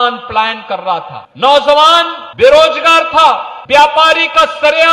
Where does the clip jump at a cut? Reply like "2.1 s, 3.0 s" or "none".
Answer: 1.2 s, 2.2 s, 3.5 s